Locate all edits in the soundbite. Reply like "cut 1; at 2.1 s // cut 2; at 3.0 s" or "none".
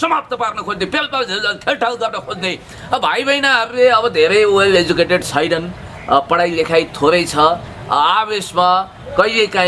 cut 1; at 2.7 s